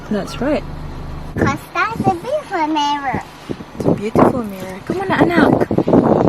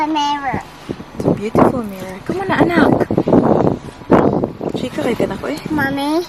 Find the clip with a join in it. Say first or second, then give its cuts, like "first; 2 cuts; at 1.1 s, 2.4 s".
first; 1 cut; at 1.4 s